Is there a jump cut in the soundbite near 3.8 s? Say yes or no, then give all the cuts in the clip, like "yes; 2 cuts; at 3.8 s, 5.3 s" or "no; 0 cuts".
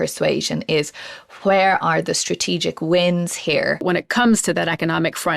yes; 1 cut; at 3.8 s